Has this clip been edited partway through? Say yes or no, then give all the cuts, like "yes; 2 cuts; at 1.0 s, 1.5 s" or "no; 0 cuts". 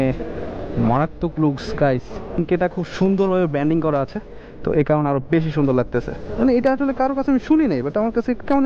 yes; 2 cuts; at 2.4 s, 6.2 s